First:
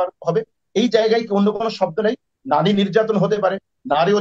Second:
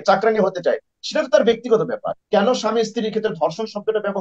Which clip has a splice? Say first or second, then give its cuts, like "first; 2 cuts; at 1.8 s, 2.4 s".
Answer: second; 1 cut; at 2.1 s